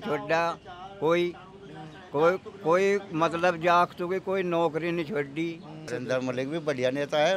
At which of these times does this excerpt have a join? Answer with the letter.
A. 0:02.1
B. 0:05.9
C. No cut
B